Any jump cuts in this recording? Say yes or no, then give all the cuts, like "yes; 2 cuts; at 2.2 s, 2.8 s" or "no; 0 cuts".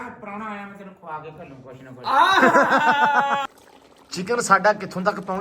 yes; 1 cut; at 3.5 s